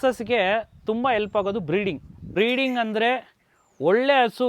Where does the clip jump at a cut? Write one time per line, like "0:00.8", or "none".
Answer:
0:02.3

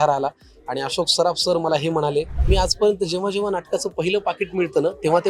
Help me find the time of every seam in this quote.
0:02.4

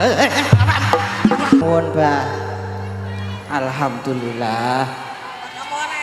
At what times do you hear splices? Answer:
0:01.6

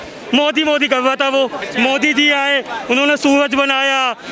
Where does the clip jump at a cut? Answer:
0:01.6

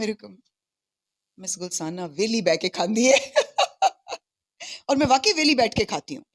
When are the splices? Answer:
none

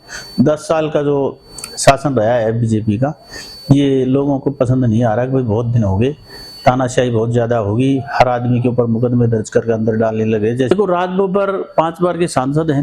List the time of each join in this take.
0:10.7

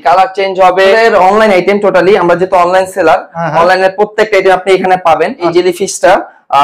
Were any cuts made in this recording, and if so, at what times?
0:00.9
0:05.5

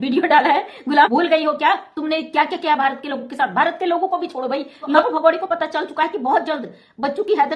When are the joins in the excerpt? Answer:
0:01.1
0:05.0

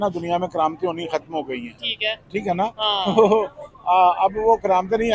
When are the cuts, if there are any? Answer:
none

